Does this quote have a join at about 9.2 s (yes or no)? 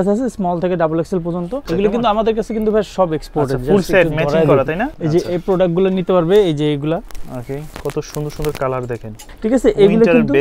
yes